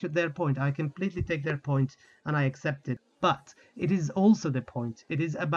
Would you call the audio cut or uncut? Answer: cut